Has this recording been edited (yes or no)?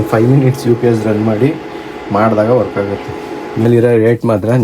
yes